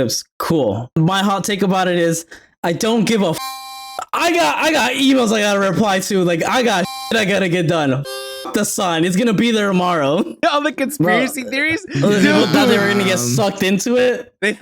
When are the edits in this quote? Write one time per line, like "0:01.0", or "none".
0:01.0
0:03.6
0:10.4